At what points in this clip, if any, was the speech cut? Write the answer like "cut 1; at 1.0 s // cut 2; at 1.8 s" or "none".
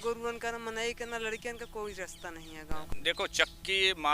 cut 1; at 2.9 s